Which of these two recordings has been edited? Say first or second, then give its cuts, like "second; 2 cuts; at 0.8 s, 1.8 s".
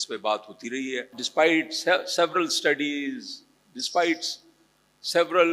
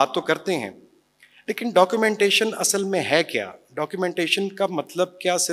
first; 1 cut; at 1.2 s